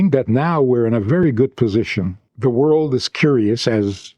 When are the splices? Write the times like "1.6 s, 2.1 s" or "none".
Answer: 2.2 s